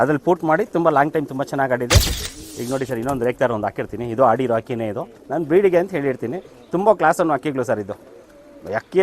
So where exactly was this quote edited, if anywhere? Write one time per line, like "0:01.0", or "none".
0:02.2